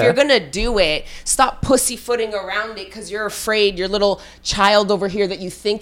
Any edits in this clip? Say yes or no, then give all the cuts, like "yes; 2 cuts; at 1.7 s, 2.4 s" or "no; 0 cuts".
no; 0 cuts